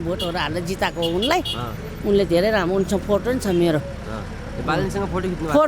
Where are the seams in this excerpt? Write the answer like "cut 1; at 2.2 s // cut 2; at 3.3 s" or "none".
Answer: none